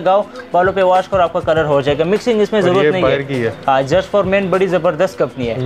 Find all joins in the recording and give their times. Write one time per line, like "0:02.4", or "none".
none